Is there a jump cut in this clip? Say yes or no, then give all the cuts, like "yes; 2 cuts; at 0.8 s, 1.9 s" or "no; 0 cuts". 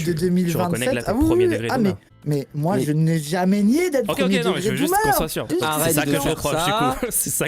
yes; 2 cuts; at 2.1 s, 5.5 s